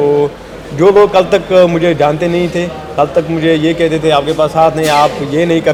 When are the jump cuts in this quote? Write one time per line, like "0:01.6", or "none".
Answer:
none